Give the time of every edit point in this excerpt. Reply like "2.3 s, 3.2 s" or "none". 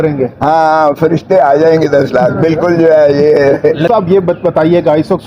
3.8 s